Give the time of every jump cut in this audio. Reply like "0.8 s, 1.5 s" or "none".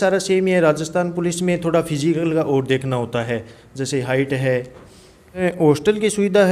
5.4 s

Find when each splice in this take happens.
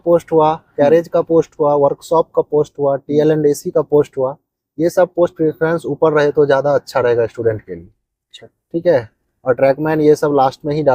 none

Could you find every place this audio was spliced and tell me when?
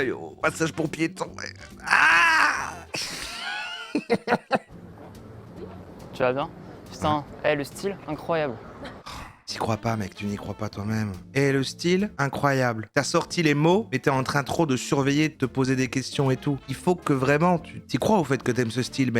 4.7 s

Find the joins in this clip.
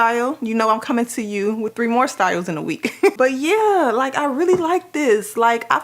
3.2 s

